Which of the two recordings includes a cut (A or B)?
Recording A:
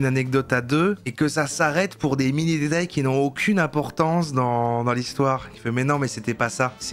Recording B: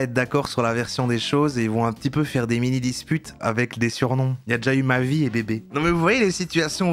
B